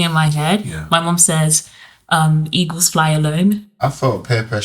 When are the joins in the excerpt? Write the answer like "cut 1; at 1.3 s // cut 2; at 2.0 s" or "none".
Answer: cut 1; at 3.7 s